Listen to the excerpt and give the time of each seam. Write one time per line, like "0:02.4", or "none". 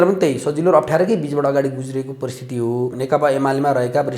0:03.0